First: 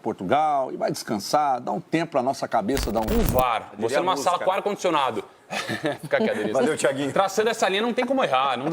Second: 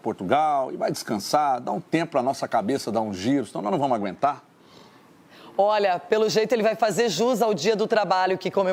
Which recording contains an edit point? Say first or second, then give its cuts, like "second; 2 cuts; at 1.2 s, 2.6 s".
first; 1 cut; at 3.1 s